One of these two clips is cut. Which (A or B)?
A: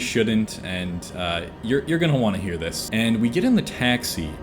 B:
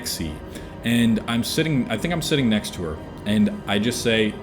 A